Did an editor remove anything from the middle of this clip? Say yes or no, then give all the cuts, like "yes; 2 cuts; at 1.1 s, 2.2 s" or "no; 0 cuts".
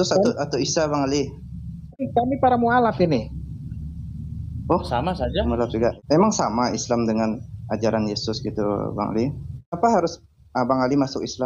yes; 3 cuts; at 2.0 s, 6.0 s, 9.8 s